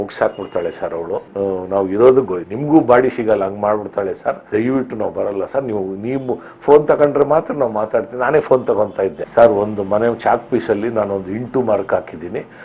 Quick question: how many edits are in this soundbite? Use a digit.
1